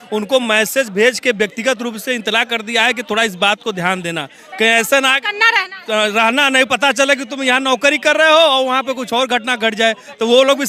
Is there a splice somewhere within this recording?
no; 0 cuts

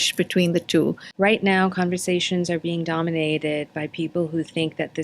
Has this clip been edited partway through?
yes; 1 cut; at 1.0 s

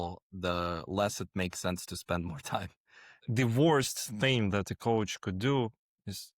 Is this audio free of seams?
no; 1 cut; at 3.3 s

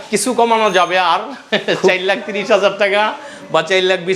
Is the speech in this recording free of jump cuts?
yes; 0 cuts

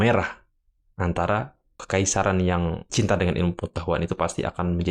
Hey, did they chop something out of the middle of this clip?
yes; 2 cuts; at 1.8 s, 2.8 s

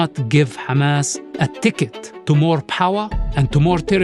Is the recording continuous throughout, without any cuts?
no; 2 cuts; at 1.2 s, 2.1 s

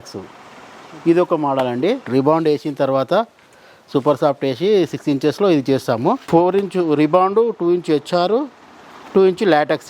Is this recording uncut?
no; 2 cuts; at 2.0 s, 6.2 s

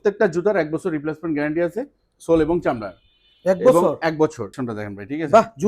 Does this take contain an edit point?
yes; 1 cut; at 4.5 s

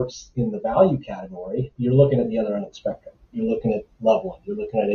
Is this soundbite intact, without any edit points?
no; 2 cuts; at 1.7 s, 3.3 s

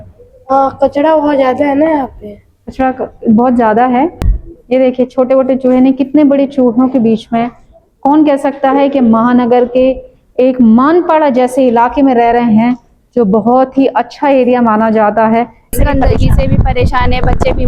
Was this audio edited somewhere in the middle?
yes; 2 cuts; at 4.2 s, 15.7 s

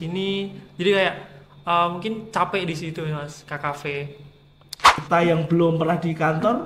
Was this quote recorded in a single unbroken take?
no; 1 cut; at 5.0 s

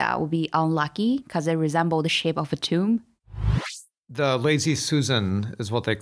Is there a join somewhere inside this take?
yes; 1 cut; at 3.7 s

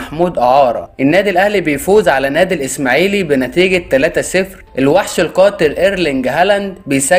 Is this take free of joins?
no; 2 cuts; at 0.9 s, 4.6 s

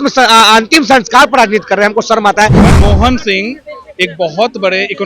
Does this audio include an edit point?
yes; 1 cut; at 2.6 s

